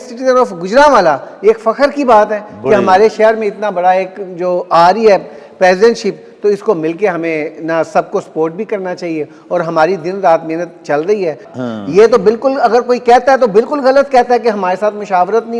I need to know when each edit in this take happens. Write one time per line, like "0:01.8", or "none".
0:11.4